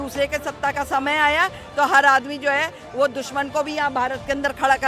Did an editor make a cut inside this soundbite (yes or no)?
no